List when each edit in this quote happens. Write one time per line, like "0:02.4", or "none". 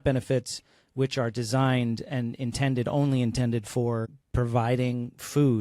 0:04.2